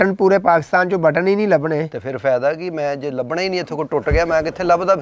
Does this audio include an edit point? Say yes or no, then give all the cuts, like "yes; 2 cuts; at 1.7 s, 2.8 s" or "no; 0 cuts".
no; 0 cuts